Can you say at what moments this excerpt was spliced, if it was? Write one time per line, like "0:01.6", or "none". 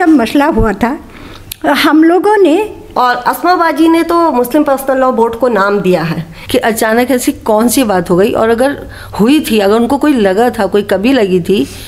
0:02.8
0:06.3